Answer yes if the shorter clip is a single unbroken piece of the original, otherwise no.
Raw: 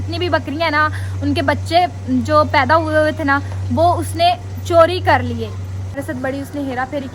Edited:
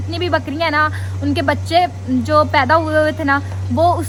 yes